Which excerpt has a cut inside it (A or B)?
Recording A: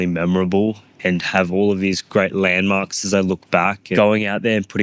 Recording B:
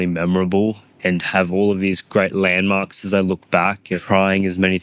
B